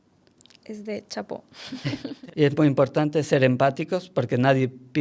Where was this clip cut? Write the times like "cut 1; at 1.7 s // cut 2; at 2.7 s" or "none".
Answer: cut 1; at 2.1 s